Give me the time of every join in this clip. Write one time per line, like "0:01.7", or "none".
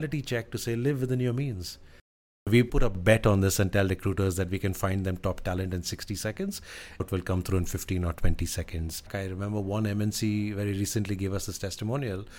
0:02.5
0:07.0
0:09.1

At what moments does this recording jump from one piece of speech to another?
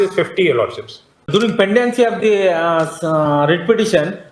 0:01.3

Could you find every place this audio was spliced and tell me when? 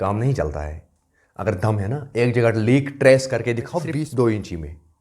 0:03.9

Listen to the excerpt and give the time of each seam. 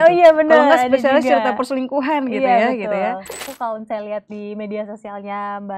0:03.5

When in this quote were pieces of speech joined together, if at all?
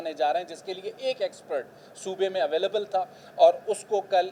none

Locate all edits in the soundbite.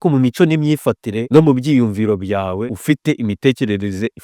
0:01.1
0:02.7

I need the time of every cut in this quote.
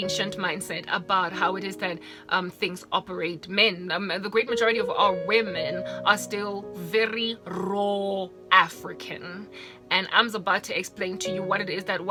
none

